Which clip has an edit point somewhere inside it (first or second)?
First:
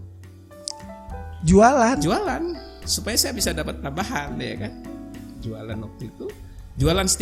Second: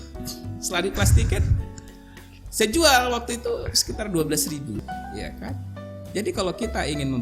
second